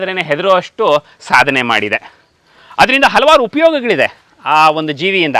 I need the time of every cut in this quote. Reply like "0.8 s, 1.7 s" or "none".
none